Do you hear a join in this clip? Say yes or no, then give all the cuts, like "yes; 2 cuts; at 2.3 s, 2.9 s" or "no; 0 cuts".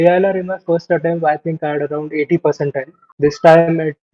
yes; 1 cut; at 2.9 s